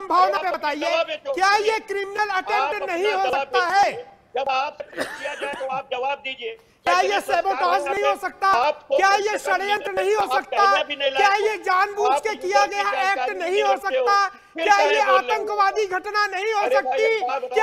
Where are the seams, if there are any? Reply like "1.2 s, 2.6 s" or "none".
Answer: none